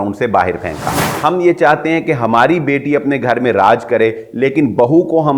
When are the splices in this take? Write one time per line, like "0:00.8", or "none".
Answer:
0:01.0